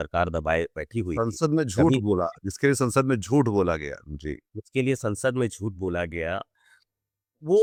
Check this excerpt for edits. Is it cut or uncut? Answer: uncut